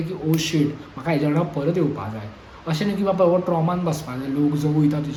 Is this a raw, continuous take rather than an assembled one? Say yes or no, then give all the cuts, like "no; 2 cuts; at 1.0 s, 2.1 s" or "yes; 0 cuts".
yes; 0 cuts